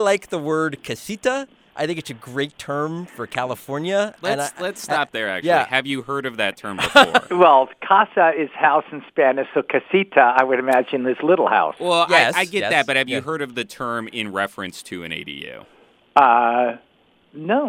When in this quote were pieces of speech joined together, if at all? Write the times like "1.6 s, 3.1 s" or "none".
none